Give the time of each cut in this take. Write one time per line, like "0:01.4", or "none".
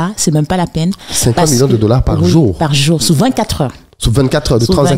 none